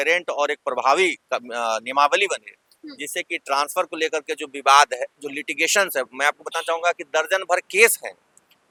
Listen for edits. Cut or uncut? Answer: uncut